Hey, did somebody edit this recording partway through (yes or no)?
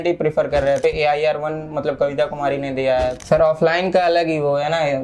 yes